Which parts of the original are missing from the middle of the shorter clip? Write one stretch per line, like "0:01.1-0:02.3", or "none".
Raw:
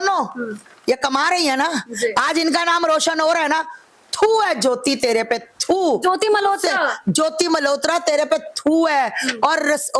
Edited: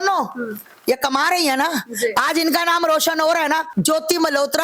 0:03.7-0:07.0